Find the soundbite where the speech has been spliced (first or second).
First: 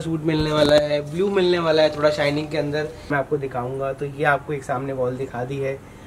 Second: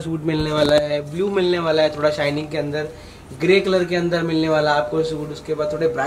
first